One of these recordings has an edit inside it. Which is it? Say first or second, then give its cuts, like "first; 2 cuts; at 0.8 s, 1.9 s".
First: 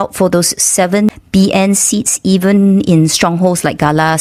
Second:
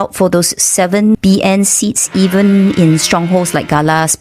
second; 1 cut; at 1.2 s